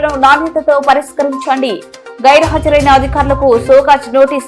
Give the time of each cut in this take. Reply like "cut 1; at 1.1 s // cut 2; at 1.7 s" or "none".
none